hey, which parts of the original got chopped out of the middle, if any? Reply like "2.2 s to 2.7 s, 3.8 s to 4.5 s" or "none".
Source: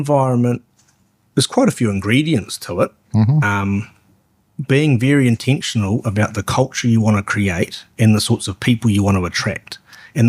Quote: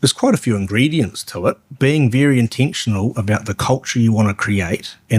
3.0 s to 4.5 s